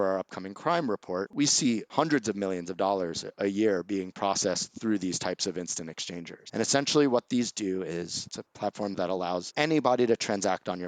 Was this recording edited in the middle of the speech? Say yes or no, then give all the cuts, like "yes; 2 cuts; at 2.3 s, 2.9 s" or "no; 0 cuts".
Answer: yes; 3 cuts; at 1.3 s, 6.3 s, 9.0 s